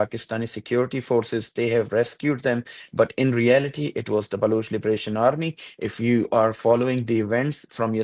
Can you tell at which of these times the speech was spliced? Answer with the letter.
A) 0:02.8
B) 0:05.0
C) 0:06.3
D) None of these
D